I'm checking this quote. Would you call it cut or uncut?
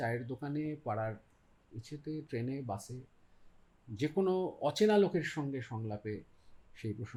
uncut